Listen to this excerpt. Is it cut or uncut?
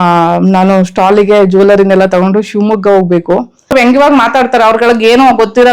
cut